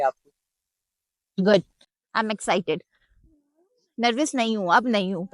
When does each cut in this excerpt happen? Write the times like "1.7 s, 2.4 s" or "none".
none